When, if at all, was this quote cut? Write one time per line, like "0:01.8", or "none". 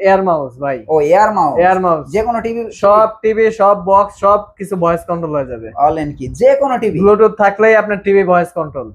none